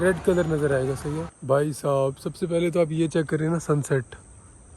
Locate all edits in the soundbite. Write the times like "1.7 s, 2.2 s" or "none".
1.3 s